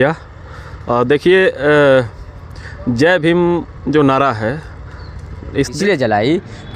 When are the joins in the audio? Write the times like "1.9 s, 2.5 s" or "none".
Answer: 5.8 s